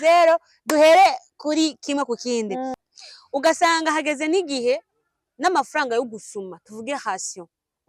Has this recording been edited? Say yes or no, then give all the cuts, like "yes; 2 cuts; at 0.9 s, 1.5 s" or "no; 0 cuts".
yes; 1 cut; at 2.8 s